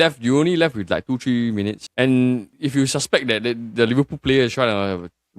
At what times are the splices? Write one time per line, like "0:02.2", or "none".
0:01.8
0:02.5